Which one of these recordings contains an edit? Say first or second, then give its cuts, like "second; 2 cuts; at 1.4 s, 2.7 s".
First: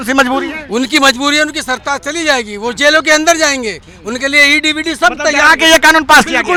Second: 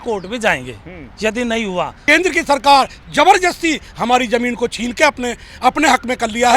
second; 1 cut; at 2.0 s